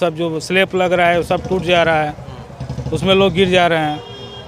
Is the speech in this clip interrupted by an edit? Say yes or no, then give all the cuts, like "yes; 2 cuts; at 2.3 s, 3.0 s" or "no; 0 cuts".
no; 0 cuts